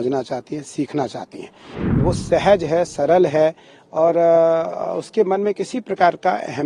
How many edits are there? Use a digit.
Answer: 1